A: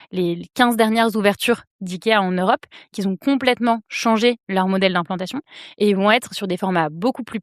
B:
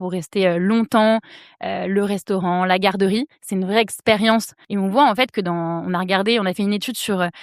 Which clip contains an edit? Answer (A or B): B